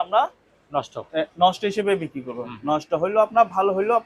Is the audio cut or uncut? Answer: uncut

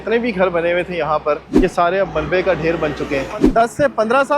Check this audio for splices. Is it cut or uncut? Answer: cut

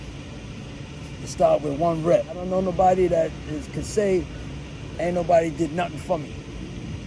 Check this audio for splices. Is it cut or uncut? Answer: cut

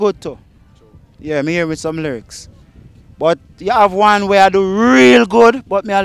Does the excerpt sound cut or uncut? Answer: uncut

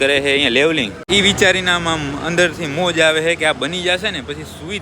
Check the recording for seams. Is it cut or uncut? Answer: cut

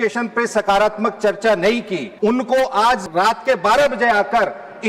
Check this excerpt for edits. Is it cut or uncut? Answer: cut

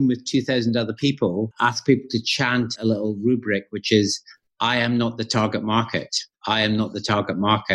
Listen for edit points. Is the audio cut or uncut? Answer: cut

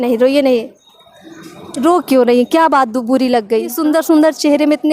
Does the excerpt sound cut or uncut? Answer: cut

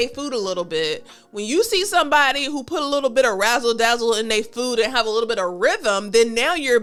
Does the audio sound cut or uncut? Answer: uncut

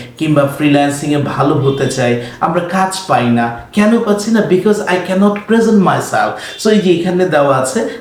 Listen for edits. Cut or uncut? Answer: uncut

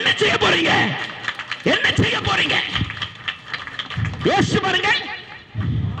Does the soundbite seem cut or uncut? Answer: uncut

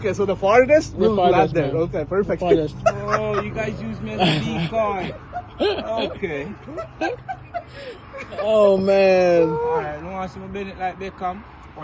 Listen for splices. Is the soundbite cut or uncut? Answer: uncut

